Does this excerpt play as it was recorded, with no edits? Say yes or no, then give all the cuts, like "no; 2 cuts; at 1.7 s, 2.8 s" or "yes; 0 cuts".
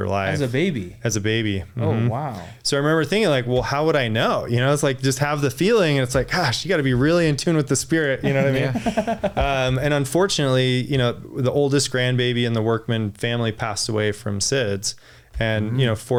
yes; 0 cuts